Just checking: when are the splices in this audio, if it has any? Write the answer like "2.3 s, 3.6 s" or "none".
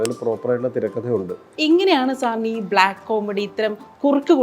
1.4 s